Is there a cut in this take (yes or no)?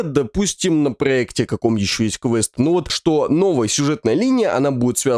yes